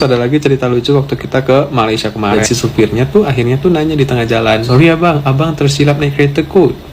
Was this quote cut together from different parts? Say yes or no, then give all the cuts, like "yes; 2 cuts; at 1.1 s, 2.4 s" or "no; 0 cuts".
yes; 2 cuts; at 2.3 s, 4.7 s